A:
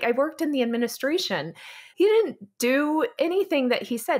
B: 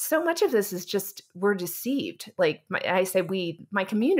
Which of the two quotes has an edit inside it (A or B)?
A